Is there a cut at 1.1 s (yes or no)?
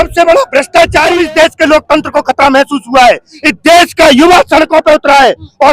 yes